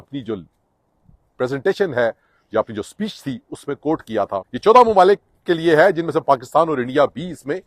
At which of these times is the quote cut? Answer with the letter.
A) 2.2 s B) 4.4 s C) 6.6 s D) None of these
B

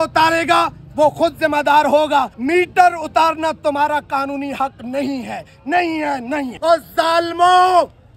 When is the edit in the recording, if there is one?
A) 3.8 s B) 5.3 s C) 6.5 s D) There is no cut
C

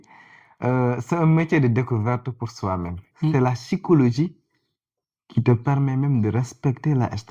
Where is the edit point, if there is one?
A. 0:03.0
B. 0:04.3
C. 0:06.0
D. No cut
A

